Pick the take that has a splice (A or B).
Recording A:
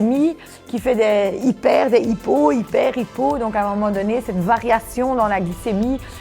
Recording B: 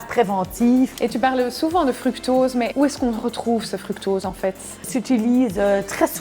B